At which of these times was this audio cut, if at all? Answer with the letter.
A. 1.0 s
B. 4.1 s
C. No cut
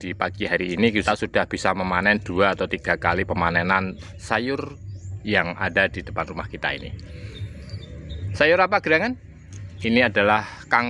A